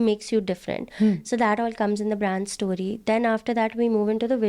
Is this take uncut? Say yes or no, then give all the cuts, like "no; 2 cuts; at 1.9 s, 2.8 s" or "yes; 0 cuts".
yes; 0 cuts